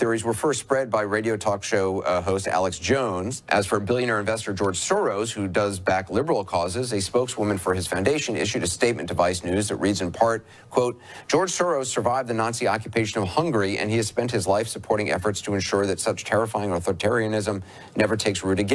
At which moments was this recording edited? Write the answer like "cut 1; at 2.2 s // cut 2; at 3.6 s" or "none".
cut 1; at 3.4 s

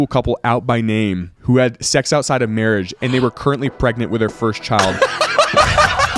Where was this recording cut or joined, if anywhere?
none

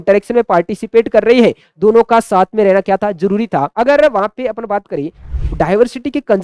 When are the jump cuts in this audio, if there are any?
cut 1; at 3.7 s // cut 2; at 5.3 s

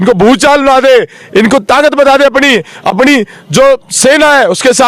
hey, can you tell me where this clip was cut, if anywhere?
none

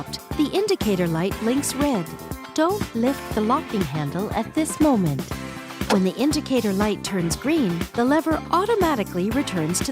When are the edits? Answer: cut 1; at 5.8 s

